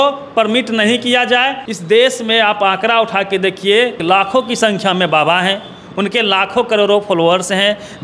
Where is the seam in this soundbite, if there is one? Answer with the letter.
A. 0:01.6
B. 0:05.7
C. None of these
A